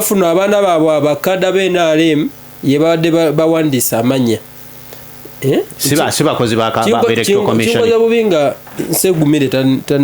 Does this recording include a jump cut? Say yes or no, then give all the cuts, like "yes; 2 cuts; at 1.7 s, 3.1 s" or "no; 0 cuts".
no; 0 cuts